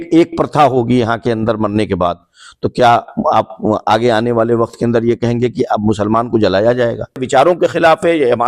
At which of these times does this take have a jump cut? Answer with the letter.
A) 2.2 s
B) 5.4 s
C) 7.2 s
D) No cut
C